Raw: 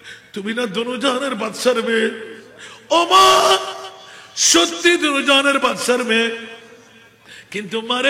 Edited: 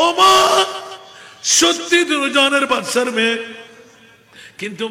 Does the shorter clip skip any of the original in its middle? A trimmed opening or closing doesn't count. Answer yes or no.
no